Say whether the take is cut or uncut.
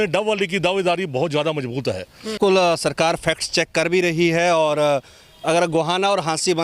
cut